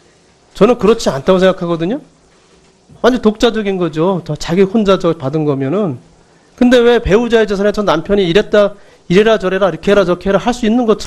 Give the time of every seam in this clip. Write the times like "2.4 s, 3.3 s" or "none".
none